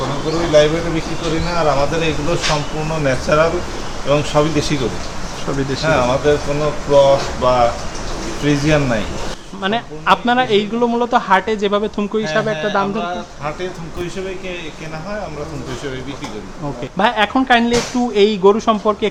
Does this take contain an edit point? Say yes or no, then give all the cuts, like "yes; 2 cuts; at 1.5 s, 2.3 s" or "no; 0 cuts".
no; 0 cuts